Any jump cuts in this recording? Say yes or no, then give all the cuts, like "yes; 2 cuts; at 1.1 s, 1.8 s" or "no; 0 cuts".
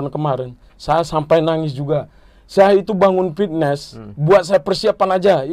no; 0 cuts